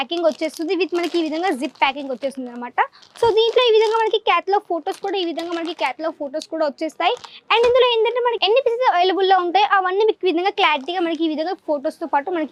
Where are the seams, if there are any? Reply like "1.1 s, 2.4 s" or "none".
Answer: none